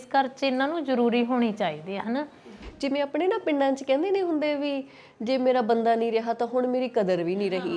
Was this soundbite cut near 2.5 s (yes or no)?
yes